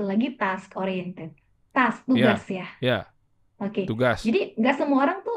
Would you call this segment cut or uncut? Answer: uncut